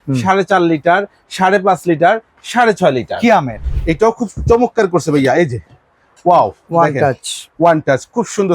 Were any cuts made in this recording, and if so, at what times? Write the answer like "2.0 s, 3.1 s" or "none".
3.6 s